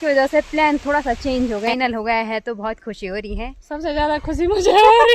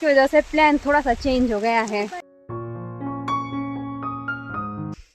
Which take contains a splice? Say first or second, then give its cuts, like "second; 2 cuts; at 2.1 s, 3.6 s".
first; 1 cut; at 1.7 s